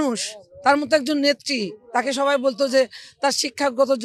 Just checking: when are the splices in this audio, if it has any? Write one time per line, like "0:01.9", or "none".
none

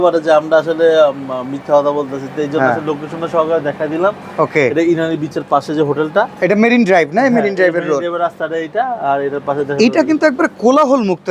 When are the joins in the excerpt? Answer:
none

